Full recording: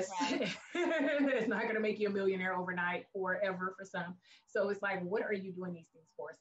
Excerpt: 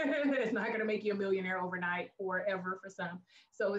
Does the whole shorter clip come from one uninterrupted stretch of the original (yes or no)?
yes